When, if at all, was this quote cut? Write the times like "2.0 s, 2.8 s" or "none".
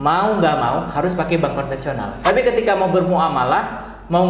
2.1 s

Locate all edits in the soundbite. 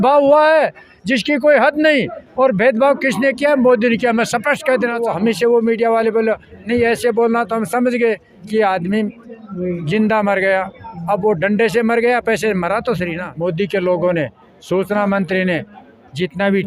5.0 s, 13.2 s

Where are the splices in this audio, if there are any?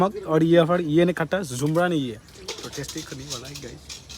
none

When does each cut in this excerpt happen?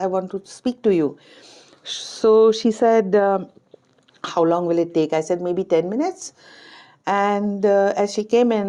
none

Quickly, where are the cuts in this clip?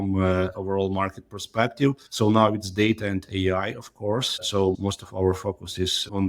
none

